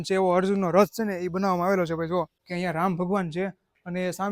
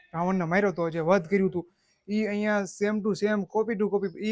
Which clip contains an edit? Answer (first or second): first